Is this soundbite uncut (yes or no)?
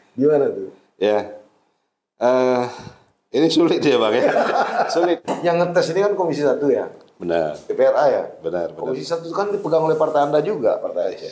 no